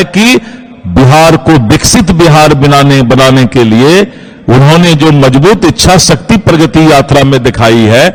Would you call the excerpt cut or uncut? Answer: uncut